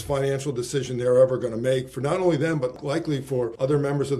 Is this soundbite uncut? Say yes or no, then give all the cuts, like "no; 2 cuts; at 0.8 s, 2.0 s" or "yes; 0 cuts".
no; 1 cut; at 3.0 s